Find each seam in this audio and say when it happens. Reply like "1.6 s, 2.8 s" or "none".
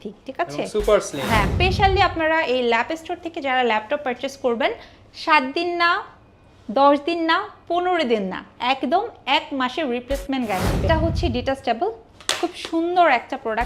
1.5 s, 10.9 s